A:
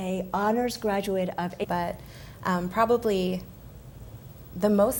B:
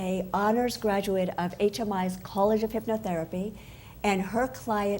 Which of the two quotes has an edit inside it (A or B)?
B